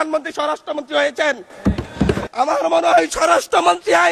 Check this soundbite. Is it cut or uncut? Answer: cut